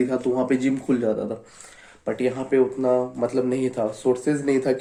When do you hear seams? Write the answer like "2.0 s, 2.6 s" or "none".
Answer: none